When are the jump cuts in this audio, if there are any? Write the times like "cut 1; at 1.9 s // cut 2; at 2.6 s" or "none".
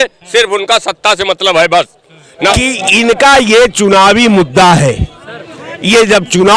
cut 1; at 2.5 s